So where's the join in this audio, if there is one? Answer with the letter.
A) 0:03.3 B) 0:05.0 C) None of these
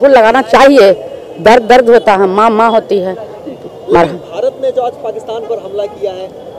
C